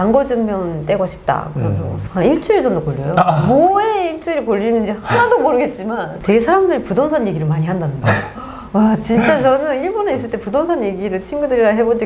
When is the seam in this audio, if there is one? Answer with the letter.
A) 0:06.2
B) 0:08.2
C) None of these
A